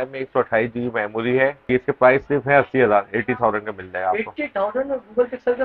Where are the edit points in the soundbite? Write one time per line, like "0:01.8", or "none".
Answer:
0:01.7